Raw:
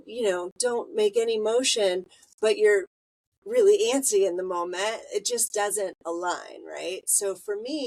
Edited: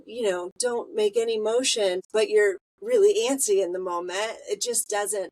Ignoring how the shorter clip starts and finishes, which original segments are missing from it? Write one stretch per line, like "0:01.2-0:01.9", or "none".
0:02.3-0:02.9